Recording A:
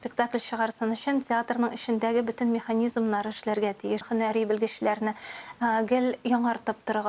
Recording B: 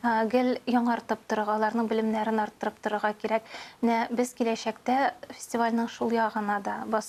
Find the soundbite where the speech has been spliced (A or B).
A